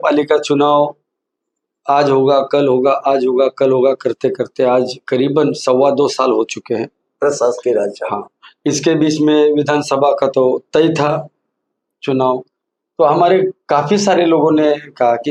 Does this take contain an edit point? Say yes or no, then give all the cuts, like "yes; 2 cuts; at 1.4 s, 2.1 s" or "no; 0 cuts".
no; 0 cuts